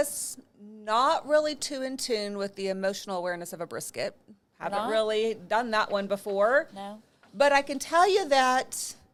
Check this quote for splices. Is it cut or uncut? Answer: uncut